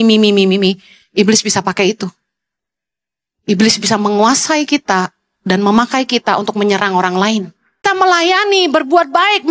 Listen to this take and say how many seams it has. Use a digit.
1